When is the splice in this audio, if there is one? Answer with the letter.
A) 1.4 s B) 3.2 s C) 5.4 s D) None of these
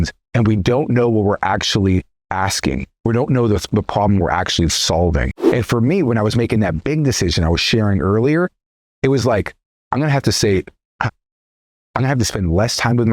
C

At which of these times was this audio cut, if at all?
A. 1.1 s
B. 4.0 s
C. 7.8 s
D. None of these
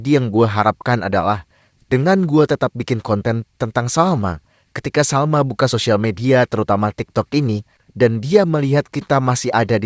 D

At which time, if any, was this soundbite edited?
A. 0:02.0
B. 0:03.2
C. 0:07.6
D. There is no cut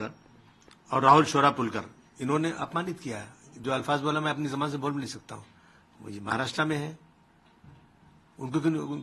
D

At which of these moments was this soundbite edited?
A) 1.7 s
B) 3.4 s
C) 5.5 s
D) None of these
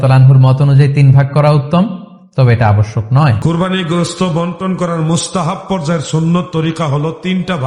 B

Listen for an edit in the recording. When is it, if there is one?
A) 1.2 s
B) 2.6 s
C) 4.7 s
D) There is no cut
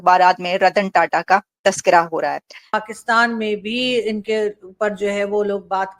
B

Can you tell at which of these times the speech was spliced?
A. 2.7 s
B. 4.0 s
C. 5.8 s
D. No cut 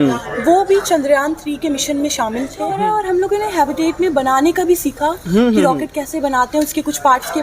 A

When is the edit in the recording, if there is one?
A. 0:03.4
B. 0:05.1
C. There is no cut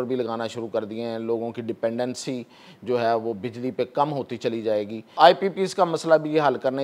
B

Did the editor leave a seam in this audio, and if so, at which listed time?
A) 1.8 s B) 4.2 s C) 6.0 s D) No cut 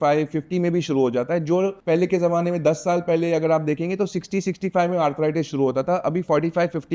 A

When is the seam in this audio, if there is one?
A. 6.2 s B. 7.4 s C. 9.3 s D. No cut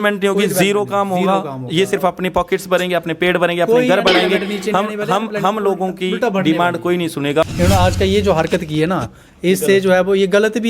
B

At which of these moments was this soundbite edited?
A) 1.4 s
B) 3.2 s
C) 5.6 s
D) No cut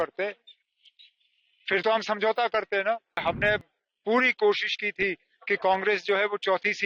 B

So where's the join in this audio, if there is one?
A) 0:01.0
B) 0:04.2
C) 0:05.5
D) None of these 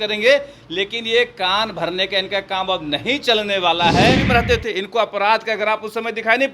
B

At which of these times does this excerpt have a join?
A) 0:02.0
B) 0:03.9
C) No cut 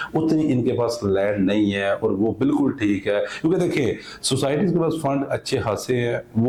C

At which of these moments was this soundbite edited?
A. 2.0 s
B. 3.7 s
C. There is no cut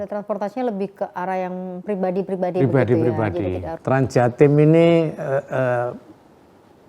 B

